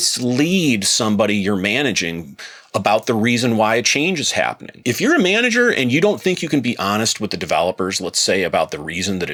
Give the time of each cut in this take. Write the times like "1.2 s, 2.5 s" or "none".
none